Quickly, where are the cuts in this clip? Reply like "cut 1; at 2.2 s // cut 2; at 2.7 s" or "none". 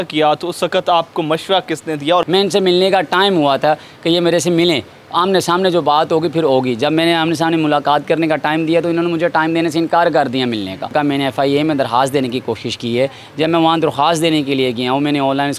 cut 1; at 2.2 s // cut 2; at 10.9 s

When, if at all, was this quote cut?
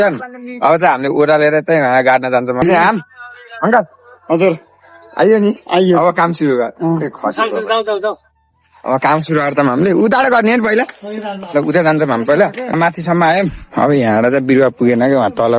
cut 1; at 2.6 s // cut 2; at 12.7 s

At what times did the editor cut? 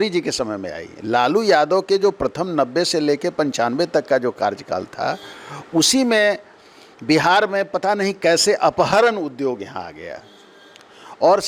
none

